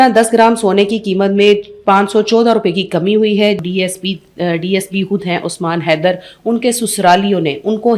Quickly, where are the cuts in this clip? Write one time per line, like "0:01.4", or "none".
0:03.6